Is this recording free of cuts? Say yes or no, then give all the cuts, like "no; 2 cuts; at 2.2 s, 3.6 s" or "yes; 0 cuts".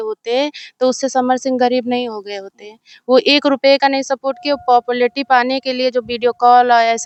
yes; 0 cuts